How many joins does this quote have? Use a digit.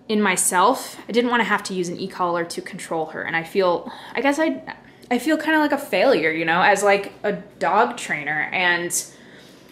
0